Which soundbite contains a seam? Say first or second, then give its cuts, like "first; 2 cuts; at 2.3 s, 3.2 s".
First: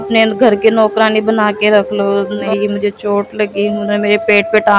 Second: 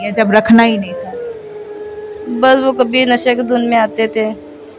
first; 1 cut; at 2.4 s